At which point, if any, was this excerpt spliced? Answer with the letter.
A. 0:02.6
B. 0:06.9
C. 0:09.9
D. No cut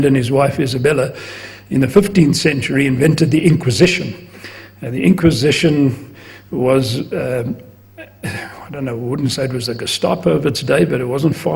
B